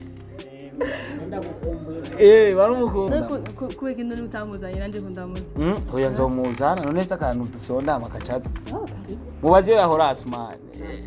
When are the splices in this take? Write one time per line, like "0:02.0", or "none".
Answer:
0:03.1